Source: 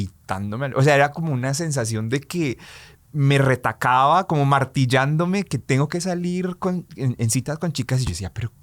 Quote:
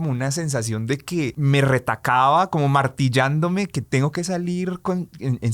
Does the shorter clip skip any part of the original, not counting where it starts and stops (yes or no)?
yes